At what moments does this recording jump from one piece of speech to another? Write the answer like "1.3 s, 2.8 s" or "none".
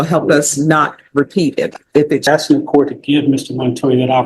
2.3 s